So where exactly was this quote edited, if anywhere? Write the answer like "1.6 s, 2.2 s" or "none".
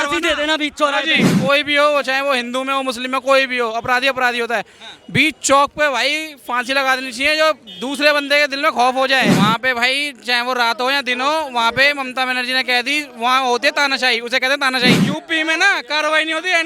1.2 s, 9.4 s, 15.0 s